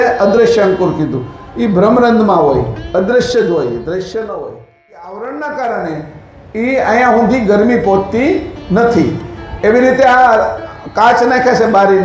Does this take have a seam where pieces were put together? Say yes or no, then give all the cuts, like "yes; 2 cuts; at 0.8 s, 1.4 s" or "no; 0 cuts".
yes; 1 cut; at 5.1 s